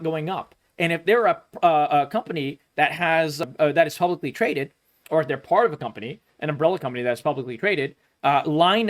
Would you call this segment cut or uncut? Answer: cut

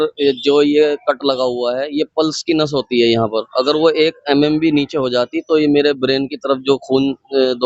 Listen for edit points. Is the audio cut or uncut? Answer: uncut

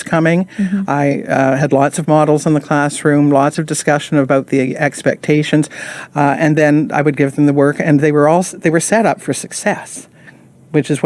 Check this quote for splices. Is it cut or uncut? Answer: uncut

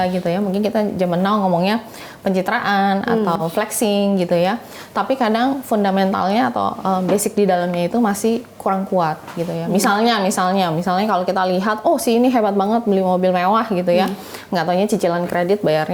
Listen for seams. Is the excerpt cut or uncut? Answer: uncut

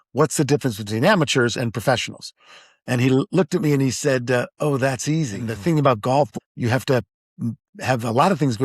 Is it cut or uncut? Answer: cut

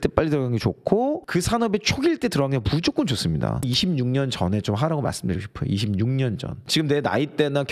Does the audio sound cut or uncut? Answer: cut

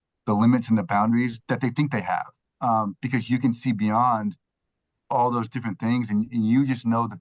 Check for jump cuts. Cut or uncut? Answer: cut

